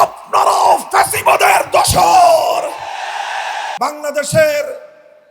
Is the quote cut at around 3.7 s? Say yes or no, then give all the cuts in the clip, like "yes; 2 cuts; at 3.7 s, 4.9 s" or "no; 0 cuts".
yes; 1 cut; at 3.7 s